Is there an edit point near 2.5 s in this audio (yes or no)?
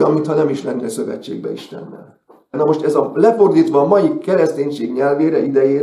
yes